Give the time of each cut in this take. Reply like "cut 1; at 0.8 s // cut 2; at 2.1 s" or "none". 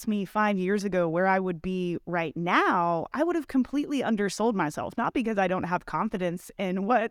none